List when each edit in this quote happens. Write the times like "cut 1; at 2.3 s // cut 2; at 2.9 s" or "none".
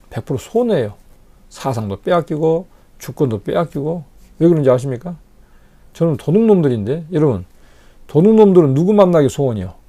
none

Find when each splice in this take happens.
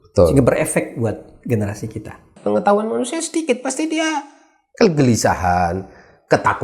cut 1; at 2.3 s

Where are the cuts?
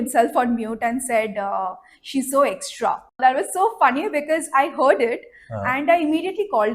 cut 1; at 3.2 s

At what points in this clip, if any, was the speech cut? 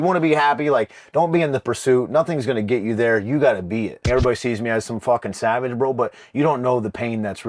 cut 1; at 4.0 s

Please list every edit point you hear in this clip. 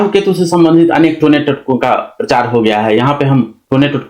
none

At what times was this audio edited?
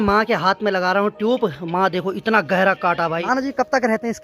cut 1; at 3.2 s

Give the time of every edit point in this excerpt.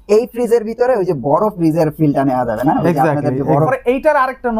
cut 1; at 3.7 s

